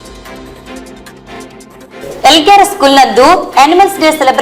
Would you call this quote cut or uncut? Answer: cut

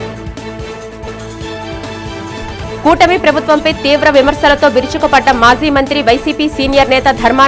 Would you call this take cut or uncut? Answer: cut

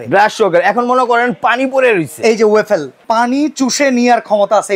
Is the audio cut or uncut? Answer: cut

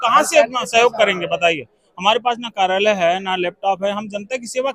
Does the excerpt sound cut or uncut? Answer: uncut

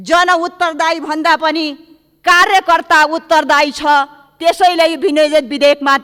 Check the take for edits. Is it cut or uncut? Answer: uncut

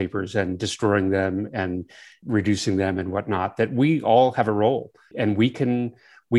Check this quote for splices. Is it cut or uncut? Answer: cut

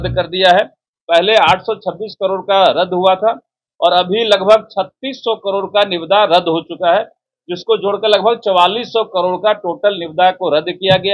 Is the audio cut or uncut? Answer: uncut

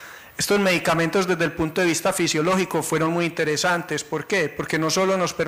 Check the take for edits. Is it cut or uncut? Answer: uncut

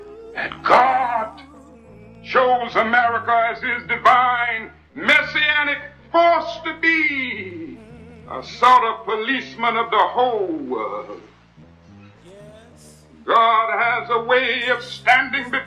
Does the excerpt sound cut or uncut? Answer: uncut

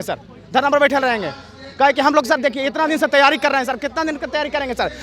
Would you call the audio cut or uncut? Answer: uncut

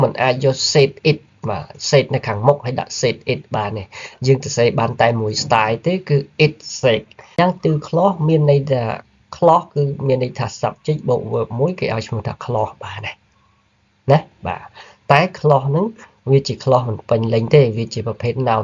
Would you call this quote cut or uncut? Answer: cut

